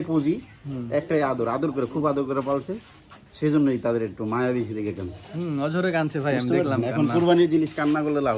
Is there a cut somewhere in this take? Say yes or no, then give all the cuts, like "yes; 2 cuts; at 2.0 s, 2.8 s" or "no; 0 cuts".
no; 0 cuts